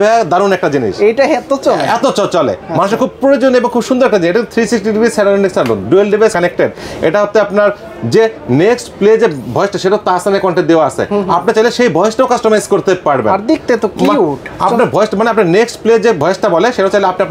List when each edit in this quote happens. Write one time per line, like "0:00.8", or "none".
none